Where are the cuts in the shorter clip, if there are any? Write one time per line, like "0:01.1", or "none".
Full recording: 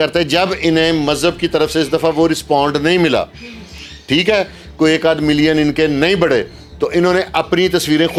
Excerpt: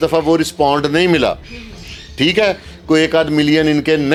none

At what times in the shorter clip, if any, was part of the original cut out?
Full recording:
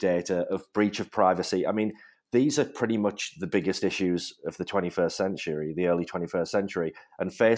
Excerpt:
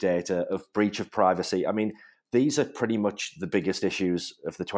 none

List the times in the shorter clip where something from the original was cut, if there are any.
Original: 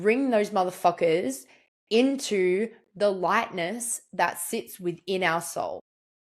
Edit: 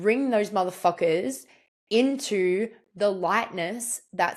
none

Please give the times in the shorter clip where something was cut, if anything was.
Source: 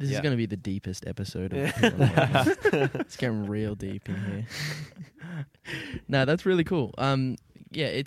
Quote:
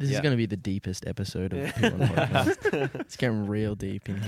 none

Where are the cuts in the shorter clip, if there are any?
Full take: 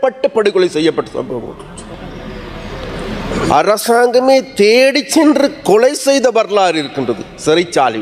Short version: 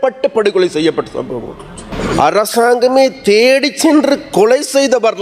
0:01.8

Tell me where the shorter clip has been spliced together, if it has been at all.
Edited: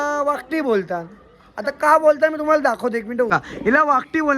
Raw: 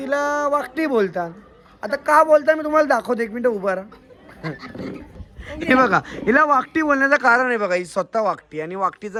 0:03.3

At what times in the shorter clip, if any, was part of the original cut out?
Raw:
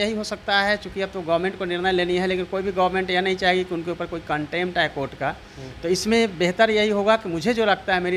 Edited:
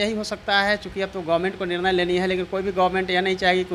none

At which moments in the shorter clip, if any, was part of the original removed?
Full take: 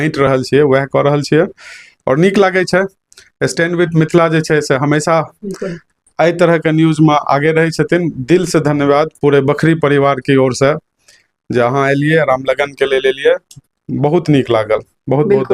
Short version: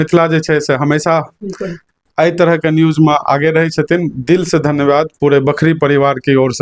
none

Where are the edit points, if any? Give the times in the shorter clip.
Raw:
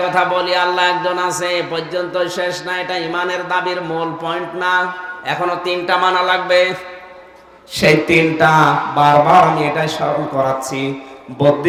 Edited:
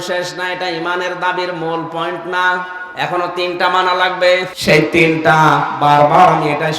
0:04.5

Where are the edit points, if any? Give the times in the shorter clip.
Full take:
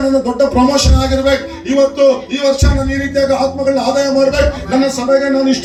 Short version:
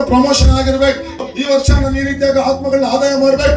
0:01.2

